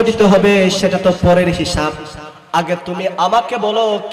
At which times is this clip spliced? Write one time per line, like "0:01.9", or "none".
none